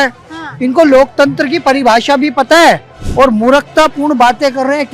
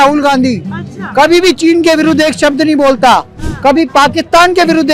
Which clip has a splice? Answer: first; 1 cut; at 3.0 s

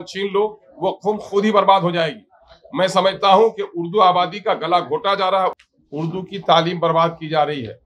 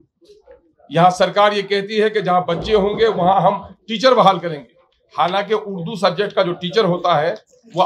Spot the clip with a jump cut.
first; 1 cut; at 5.6 s

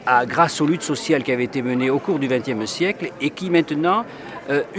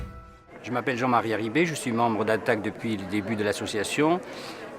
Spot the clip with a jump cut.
second; 1 cut; at 2.0 s

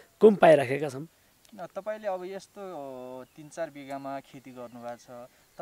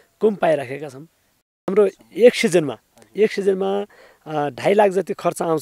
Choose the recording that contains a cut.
second; 1 cut; at 1.7 s

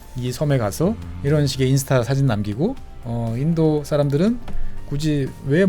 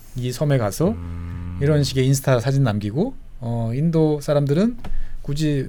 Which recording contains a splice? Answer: first; 1 cut; at 1.1 s

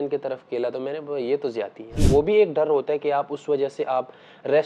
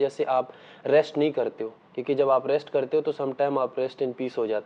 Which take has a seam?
first; 1 cut; at 1.9 s

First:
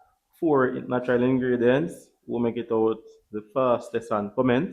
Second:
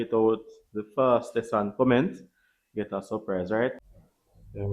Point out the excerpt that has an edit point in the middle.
second; 1 cut; at 3.8 s

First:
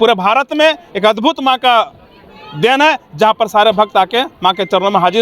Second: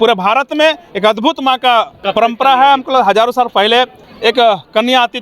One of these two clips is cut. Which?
second; 2 cuts; at 2.1 s, 4.0 s

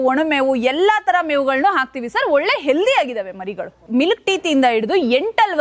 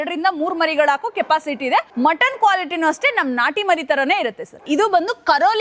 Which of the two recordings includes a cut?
second; 1 cut; at 1.9 s

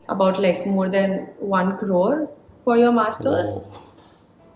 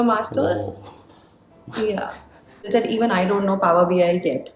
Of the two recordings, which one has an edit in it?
second; 1 cut; at 2.6 s

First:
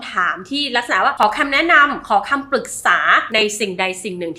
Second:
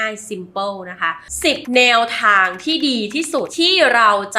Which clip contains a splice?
second; 1 cut; at 1.3 s

